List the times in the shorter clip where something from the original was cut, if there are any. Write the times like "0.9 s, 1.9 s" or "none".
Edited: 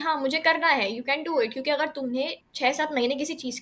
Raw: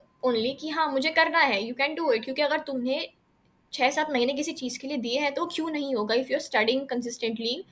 2.4 s